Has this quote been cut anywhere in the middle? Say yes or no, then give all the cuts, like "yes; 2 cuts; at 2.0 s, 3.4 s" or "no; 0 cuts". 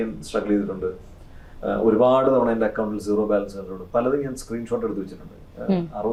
no; 0 cuts